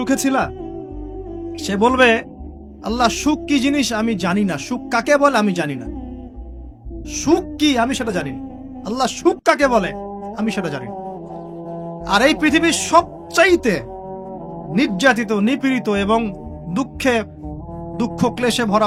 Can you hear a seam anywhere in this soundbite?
no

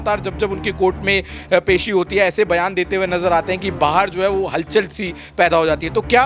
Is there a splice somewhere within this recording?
no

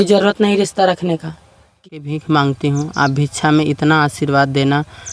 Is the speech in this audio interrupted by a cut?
yes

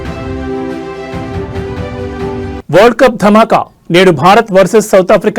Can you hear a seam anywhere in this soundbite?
no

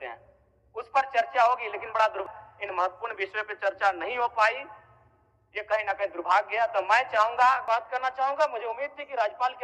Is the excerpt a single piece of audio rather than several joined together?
no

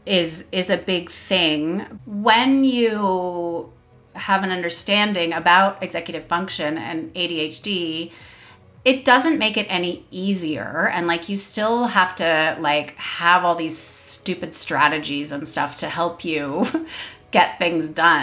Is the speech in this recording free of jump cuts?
no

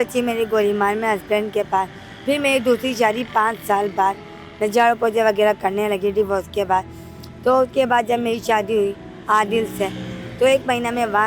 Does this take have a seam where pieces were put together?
no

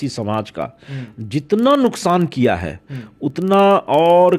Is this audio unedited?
yes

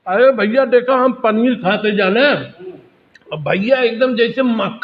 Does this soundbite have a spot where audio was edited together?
no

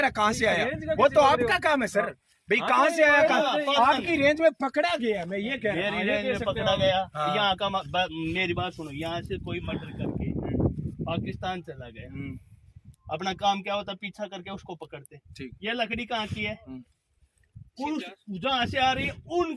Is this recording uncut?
yes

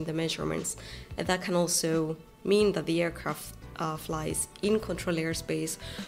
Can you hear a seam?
no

